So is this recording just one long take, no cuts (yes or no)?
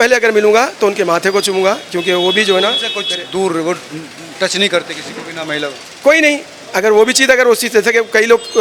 yes